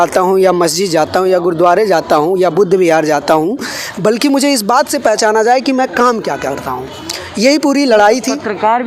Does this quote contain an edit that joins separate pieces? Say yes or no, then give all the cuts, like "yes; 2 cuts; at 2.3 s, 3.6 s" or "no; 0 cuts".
no; 0 cuts